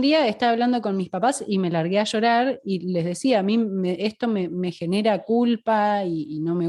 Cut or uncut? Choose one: uncut